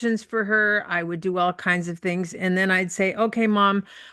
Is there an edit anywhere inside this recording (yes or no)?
no